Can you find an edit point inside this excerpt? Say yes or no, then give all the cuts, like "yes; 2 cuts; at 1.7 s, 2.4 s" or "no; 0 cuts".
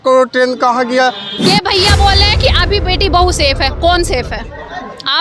yes; 1 cut; at 1.3 s